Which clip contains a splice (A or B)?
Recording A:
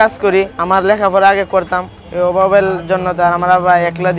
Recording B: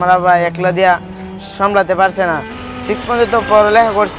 B